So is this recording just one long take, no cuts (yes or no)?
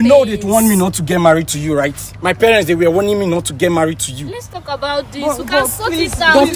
yes